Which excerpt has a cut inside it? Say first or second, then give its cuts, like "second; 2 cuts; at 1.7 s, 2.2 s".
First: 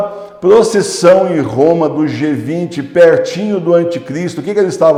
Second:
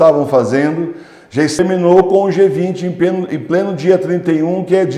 second; 1 cut; at 1.6 s